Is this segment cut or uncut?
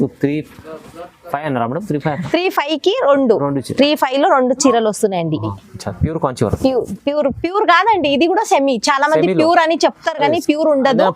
cut